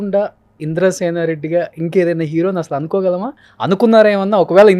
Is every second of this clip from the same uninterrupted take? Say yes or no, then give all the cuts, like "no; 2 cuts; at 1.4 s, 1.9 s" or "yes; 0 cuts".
yes; 0 cuts